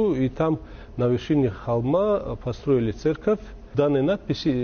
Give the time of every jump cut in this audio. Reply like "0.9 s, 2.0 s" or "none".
3.7 s